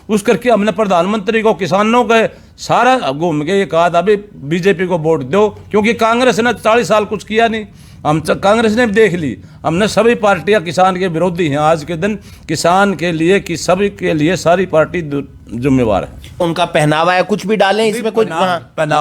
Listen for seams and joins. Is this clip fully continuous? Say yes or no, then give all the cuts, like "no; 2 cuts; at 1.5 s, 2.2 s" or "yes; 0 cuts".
no; 1 cut; at 16.4 s